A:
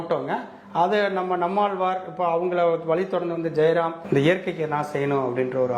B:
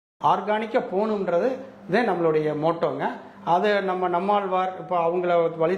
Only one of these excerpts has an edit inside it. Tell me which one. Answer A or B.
A